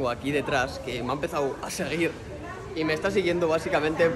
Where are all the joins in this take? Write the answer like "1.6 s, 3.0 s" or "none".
none